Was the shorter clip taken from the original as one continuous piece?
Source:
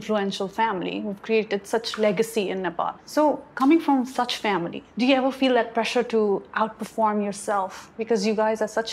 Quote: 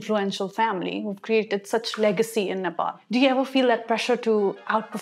no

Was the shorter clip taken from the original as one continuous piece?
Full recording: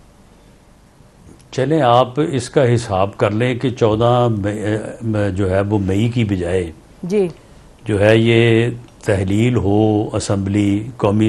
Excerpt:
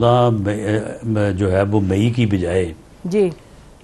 yes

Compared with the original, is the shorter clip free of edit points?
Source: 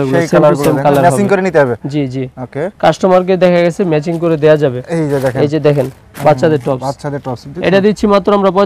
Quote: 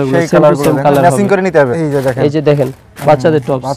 no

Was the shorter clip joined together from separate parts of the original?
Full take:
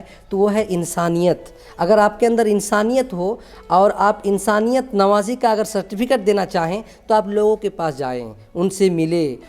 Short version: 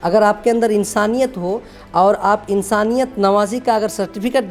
no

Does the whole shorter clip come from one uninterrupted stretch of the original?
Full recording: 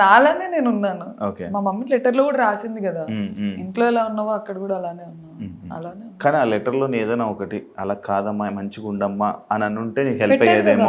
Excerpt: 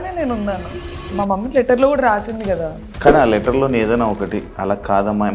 no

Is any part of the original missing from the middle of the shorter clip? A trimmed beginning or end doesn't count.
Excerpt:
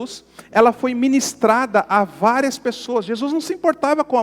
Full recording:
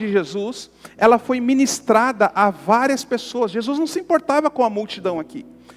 no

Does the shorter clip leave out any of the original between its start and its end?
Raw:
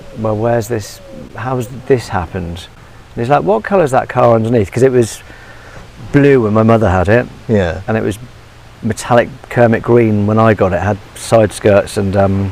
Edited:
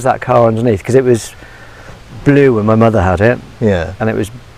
no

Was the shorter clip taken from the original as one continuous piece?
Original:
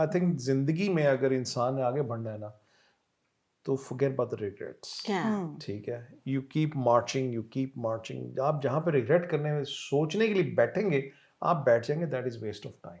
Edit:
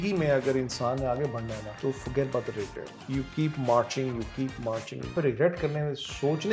no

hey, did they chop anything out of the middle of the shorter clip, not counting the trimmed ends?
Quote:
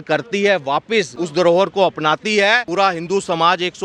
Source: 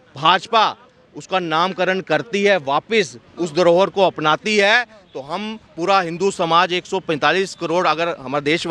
yes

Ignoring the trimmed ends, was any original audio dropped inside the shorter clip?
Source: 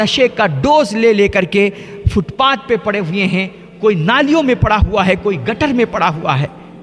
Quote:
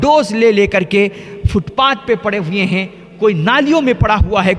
no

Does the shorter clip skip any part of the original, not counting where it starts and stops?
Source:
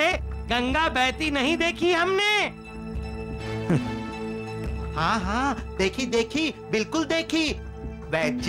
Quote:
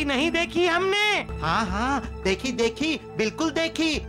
yes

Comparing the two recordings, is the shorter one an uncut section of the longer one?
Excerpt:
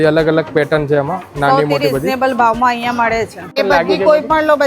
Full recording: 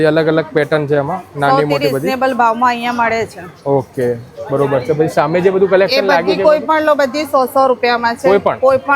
no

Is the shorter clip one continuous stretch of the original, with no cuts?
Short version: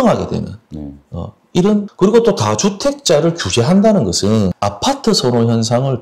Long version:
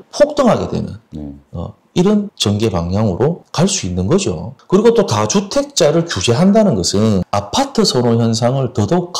no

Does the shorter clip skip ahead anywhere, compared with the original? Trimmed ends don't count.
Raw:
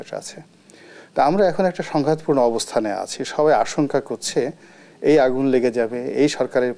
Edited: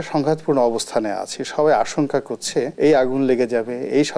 yes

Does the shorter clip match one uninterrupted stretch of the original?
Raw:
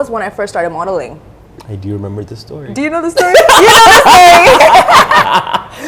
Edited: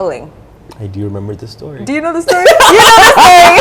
yes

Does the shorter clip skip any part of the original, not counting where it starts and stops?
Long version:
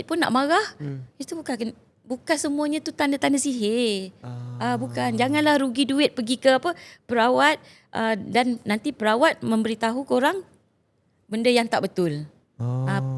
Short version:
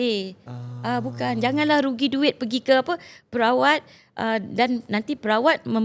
no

